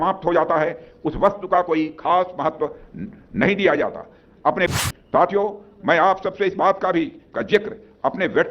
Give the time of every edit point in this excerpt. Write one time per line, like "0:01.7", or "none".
0:04.8